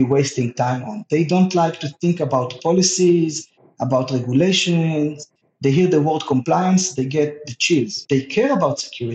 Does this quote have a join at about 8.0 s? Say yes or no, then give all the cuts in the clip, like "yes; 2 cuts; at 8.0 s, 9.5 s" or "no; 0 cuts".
yes; 1 cut; at 8.0 s